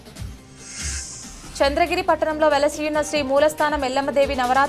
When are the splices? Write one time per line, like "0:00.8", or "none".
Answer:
0:01.3